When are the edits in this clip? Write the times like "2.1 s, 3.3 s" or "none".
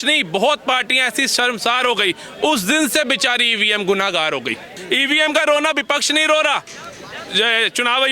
4.7 s